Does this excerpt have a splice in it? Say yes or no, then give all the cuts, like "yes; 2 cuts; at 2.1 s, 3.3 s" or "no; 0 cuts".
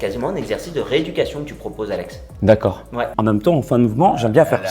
yes; 1 cut; at 3.2 s